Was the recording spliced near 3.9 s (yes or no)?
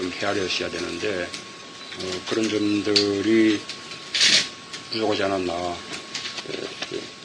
yes